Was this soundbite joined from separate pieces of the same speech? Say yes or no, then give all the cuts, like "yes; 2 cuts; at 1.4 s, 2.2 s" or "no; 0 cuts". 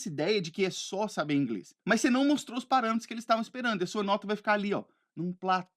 yes; 1 cut; at 1.7 s